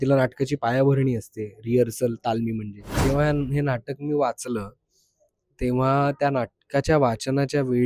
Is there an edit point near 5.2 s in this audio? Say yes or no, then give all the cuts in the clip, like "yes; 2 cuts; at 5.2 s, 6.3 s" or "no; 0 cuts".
no; 1 cut; at 3.0 s